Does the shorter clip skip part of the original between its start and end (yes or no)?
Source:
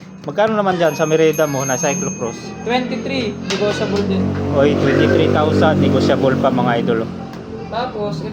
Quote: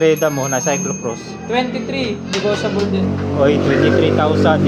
no